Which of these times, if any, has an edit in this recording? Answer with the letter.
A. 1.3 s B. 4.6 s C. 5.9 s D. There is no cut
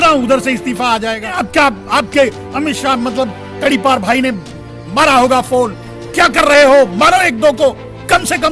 A